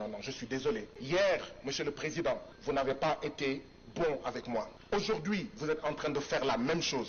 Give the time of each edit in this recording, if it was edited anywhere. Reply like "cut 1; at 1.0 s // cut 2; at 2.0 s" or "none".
cut 1; at 0.9 s // cut 2; at 2.5 s // cut 3; at 4.8 s